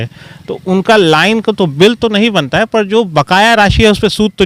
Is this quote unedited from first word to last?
yes; 0 cuts

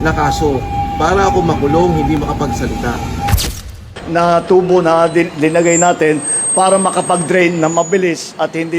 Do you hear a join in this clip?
yes; 1 cut; at 3.7 s

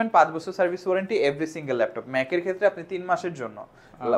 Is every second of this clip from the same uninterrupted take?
yes; 0 cuts

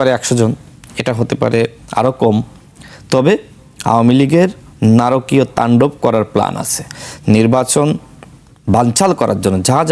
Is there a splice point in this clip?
no; 0 cuts

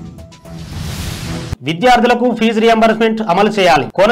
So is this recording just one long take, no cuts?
no; 1 cut; at 1.4 s

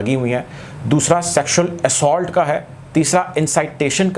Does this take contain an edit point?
no; 0 cuts

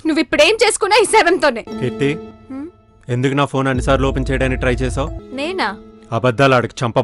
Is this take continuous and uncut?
no; 3 cuts; at 1.7 s, 2.4 s, 5.2 s

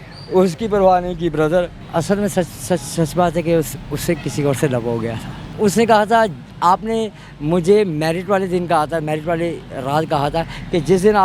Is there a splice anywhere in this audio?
yes; 2 cuts; at 1.8 s, 5.5 s

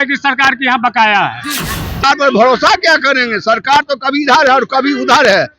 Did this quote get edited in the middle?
yes; 1 cut; at 2.0 s

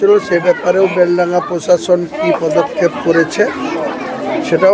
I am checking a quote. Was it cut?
no; 0 cuts

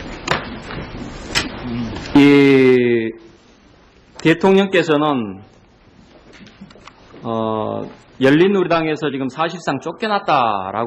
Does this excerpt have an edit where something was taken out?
no; 0 cuts

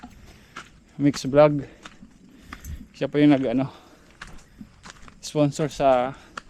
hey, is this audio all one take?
yes; 0 cuts

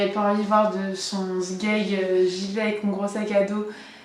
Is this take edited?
yes; 1 cut; at 2.1 s

